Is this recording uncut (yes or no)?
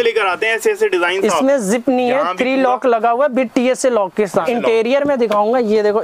no